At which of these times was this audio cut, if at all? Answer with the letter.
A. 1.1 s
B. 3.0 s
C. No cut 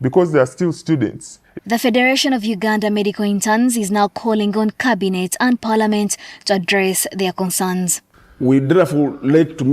A